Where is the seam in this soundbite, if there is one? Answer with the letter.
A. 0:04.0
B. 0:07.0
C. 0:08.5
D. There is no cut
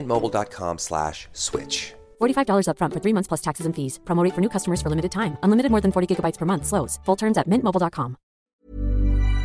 C